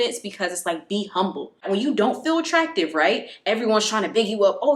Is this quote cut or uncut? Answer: cut